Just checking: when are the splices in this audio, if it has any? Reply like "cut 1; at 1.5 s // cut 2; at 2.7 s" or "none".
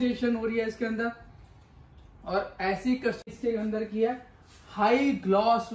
cut 1; at 3.2 s